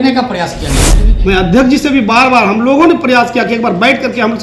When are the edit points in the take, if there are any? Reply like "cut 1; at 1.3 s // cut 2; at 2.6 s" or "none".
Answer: cut 1; at 1.0 s